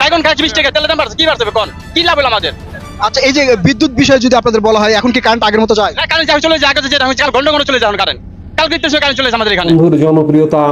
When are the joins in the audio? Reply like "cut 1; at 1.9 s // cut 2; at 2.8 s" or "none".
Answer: cut 1; at 9.7 s